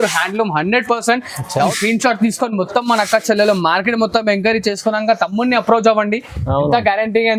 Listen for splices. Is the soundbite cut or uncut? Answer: cut